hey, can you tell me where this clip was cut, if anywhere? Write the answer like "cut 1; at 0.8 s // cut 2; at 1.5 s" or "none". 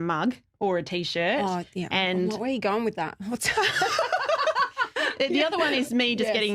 none

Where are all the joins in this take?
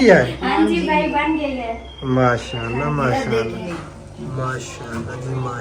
cut 1; at 3.8 s

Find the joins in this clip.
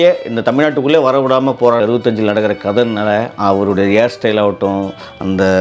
cut 1; at 1.8 s

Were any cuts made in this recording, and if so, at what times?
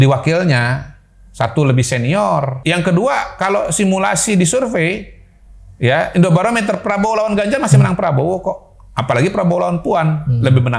cut 1; at 2.5 s

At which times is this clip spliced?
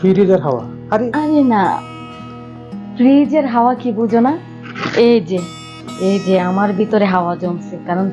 none

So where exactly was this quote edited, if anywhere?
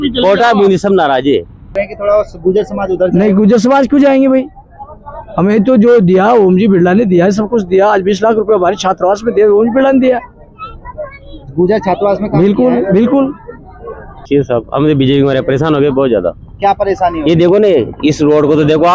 cut 1; at 1.8 s // cut 2; at 14.2 s

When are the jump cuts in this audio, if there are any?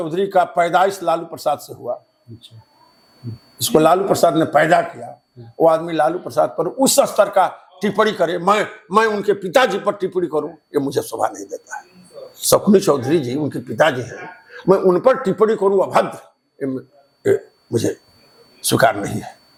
none

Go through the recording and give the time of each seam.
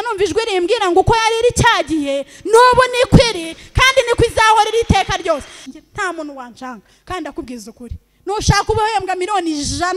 cut 1; at 5.6 s

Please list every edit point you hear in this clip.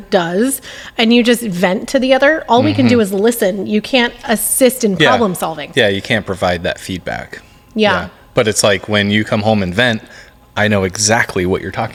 none

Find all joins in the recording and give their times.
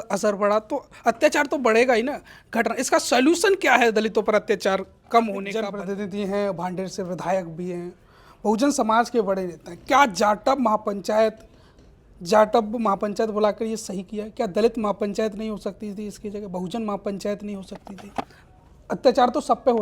cut 1; at 5.6 s

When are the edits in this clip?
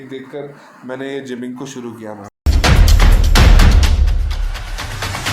cut 1; at 2.2 s

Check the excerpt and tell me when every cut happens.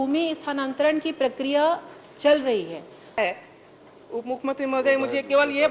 cut 1; at 3.2 s

